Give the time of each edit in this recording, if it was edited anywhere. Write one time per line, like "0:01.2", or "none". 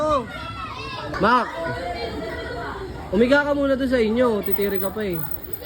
0:01.0